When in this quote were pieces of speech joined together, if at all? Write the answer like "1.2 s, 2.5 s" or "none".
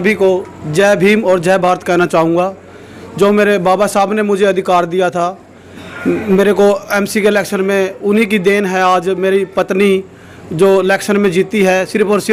none